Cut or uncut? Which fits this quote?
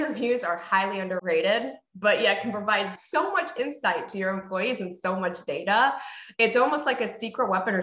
cut